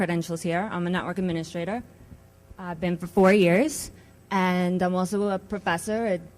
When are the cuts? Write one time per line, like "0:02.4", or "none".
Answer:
0:04.7